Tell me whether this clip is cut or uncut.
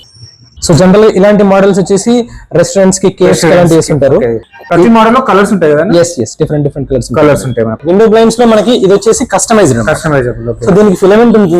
cut